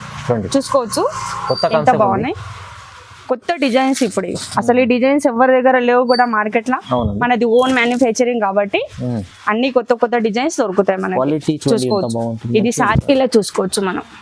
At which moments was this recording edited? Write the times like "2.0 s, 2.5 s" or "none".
12.9 s